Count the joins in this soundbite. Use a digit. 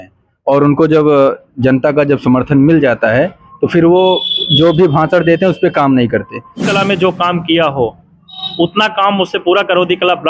1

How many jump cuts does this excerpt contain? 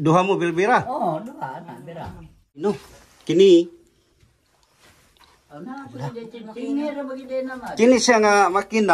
1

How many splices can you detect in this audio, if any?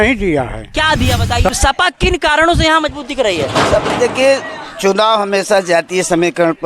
1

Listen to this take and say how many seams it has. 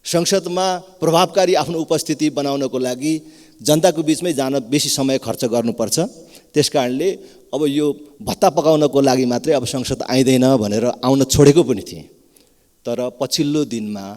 0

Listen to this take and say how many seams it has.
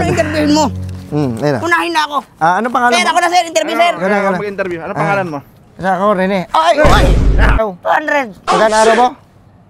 1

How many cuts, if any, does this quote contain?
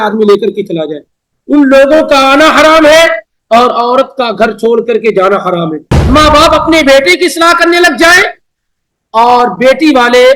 1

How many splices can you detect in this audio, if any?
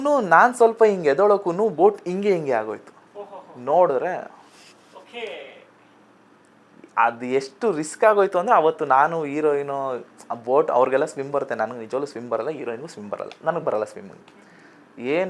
0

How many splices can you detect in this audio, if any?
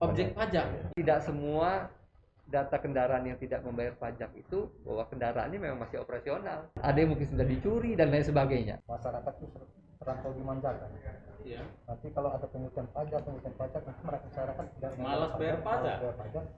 3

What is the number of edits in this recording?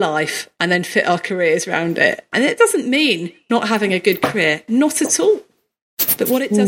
1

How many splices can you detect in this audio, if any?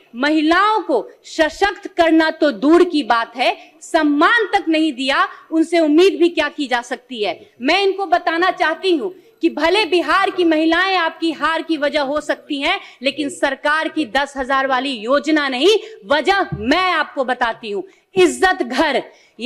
0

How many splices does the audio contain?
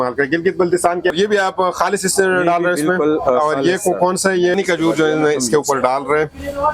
2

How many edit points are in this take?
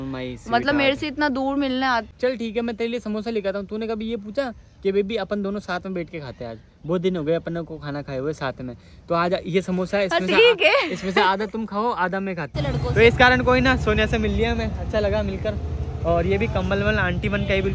2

